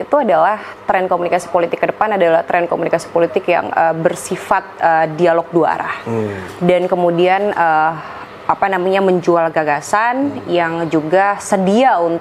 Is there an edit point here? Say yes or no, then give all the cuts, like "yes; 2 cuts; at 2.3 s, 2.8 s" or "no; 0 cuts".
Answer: no; 0 cuts